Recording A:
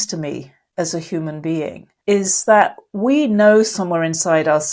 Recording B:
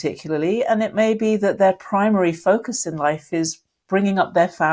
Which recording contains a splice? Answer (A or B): A